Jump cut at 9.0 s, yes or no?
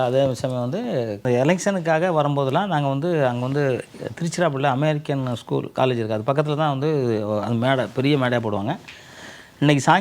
no